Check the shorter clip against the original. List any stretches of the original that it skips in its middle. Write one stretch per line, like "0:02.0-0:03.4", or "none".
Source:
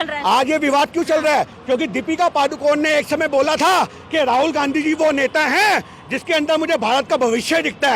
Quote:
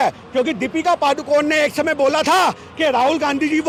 none